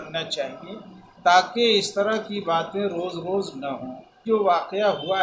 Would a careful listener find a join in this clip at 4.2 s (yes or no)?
yes